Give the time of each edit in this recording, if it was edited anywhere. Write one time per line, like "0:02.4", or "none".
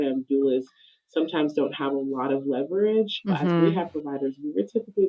0:03.6